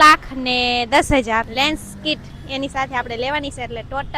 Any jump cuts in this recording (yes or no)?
yes